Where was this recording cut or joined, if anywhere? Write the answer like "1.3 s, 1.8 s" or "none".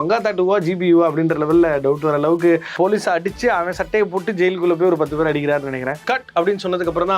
2.7 s, 6.0 s